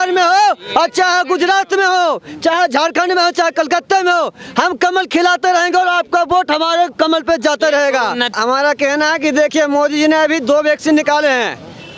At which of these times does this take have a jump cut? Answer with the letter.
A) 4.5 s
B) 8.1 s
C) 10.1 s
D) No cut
D